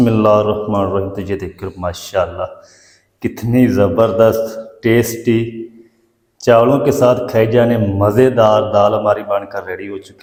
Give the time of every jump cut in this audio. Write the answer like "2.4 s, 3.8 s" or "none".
none